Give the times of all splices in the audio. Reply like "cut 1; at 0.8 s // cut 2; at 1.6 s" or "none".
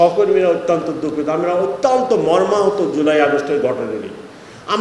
none